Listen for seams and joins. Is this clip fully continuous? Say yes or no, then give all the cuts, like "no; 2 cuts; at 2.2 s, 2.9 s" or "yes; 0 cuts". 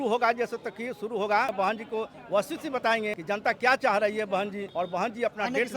no; 3 cuts; at 1.5 s, 3.2 s, 4.6 s